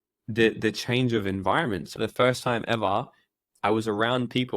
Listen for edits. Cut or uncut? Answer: cut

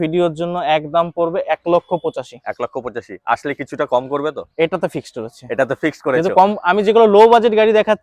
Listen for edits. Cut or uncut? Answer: uncut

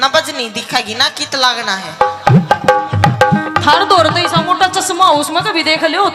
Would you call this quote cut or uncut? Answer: uncut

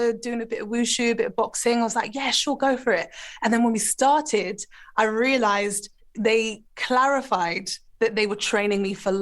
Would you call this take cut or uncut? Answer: cut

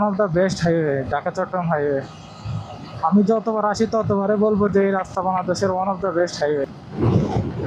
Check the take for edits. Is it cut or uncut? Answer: uncut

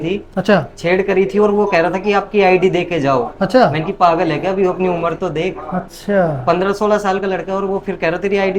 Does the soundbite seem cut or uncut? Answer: uncut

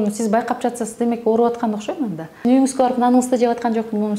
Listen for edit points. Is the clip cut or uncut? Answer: cut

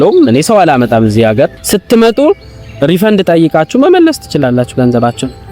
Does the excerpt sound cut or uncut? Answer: cut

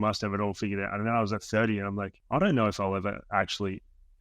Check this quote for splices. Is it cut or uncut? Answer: cut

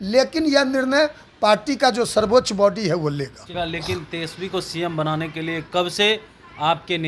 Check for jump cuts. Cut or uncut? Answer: cut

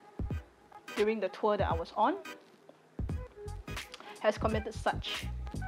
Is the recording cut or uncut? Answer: cut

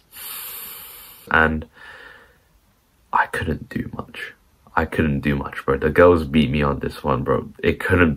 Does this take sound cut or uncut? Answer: cut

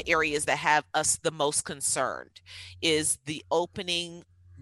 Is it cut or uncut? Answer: uncut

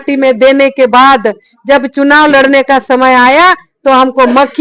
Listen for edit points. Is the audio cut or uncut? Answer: uncut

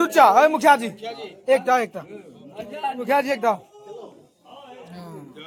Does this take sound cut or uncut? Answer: uncut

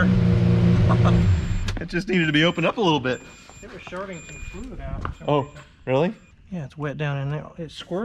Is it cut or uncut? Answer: uncut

